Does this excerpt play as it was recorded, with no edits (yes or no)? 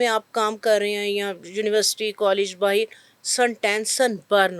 yes